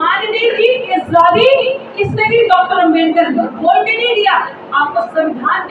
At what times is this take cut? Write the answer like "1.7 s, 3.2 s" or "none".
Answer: none

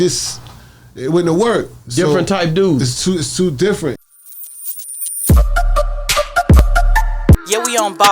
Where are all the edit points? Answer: 4.0 s

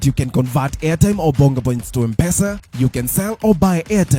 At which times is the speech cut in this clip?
2.7 s

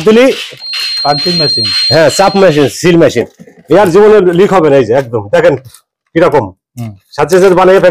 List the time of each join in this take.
none

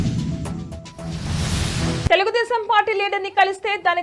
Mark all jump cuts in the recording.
none

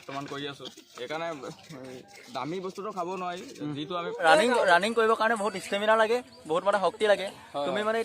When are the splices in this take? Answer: 4.1 s

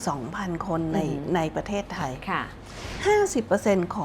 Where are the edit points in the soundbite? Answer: 2.8 s

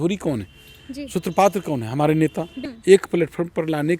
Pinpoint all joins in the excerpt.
2.7 s

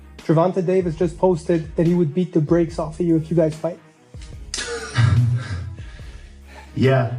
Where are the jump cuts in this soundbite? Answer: none

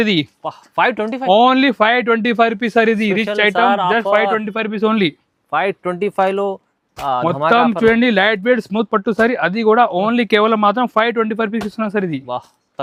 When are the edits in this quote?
none

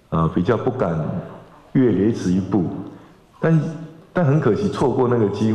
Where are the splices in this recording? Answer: none

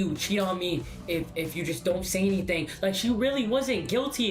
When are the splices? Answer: none

